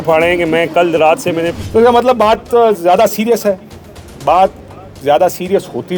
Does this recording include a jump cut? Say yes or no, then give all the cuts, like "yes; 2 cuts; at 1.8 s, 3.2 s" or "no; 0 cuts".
yes; 1 cut; at 1.6 s